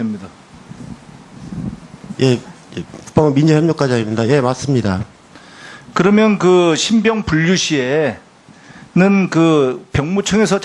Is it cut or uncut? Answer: cut